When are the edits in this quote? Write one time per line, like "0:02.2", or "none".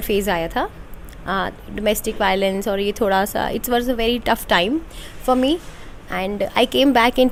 none